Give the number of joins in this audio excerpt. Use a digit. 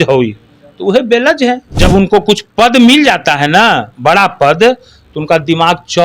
1